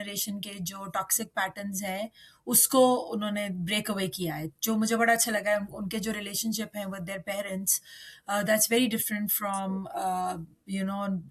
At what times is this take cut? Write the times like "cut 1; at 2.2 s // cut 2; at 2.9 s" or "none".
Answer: none